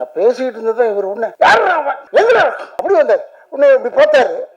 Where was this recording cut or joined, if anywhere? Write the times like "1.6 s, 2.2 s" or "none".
1.6 s, 2.7 s